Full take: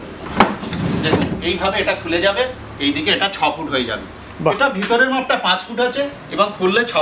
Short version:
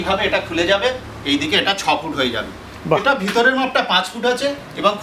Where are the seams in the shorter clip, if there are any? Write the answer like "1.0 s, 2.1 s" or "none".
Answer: none